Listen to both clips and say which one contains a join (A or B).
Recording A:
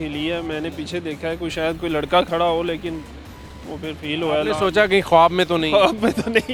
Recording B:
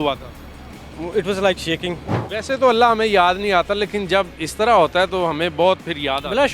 B